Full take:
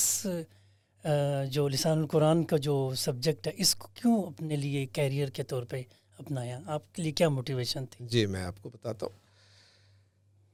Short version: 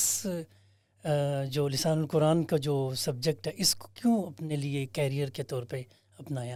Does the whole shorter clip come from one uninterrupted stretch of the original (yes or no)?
yes